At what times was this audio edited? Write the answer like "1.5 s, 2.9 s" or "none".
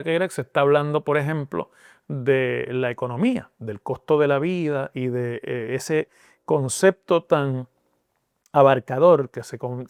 none